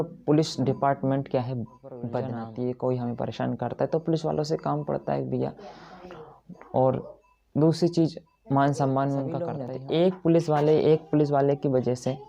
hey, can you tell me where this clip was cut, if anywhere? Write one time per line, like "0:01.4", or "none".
0:02.4
0:09.7